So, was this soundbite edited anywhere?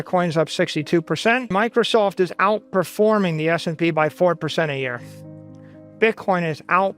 yes; 1 cut; at 1.5 s

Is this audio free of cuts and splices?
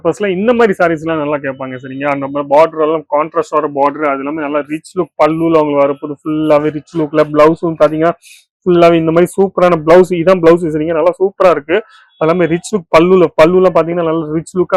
yes; 0 cuts

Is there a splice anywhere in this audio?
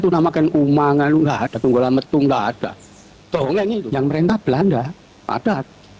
yes; 1 cut; at 4.3 s

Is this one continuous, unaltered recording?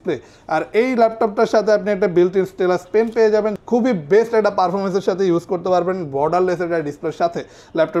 no; 1 cut; at 3.6 s

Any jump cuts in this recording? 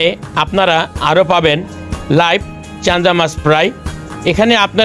no; 0 cuts

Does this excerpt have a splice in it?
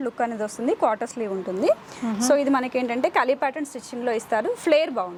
no; 0 cuts

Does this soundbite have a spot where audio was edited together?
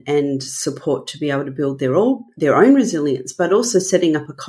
no; 0 cuts

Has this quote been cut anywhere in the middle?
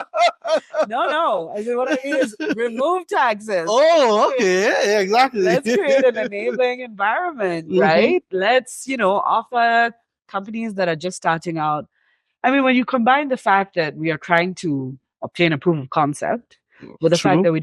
no; 0 cuts

